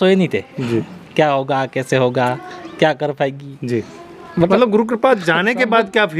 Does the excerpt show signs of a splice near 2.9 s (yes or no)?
no